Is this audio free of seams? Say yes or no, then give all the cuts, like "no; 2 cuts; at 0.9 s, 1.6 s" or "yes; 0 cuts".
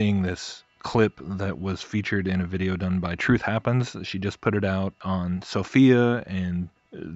no; 1 cut; at 1.2 s